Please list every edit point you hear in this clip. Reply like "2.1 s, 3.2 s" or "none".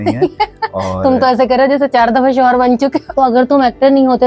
3.1 s

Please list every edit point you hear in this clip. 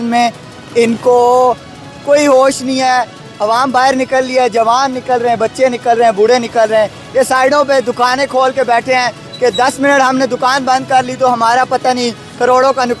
none

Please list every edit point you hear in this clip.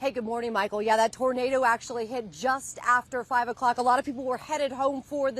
0.9 s

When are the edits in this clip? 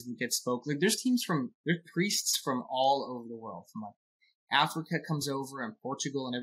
none

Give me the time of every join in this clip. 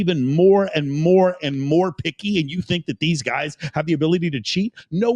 none

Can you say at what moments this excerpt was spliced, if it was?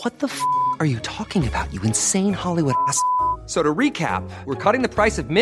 none

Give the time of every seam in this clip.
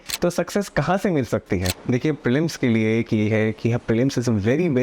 1.7 s

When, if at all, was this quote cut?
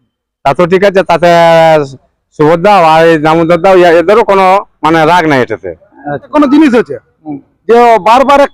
6.3 s

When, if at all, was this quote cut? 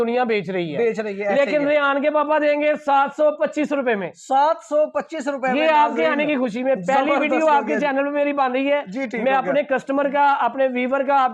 none

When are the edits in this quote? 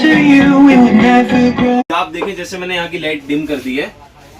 1.8 s

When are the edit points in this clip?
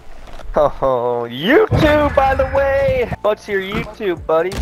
3.1 s

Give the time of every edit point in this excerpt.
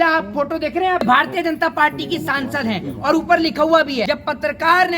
1.0 s, 4.1 s

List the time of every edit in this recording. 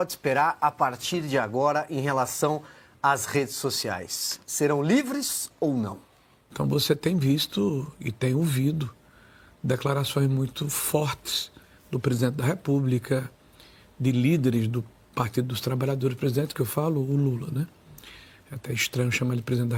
none

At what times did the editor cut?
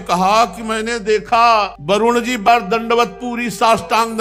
none

